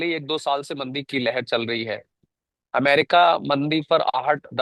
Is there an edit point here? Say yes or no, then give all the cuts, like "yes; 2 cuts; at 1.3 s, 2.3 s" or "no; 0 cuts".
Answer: no; 0 cuts